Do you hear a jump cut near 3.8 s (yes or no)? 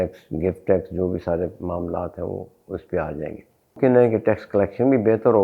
yes